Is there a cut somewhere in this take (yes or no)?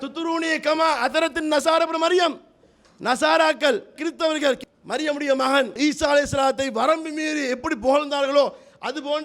yes